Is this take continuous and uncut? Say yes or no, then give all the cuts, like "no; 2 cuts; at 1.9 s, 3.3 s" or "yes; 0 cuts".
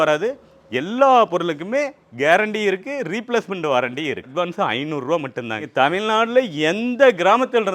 no; 2 cuts; at 4.3 s, 5.6 s